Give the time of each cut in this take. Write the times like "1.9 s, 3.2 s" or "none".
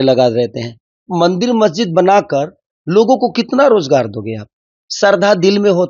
1.1 s